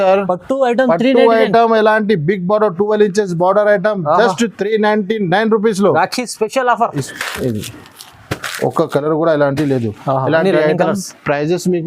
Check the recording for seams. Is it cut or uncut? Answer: cut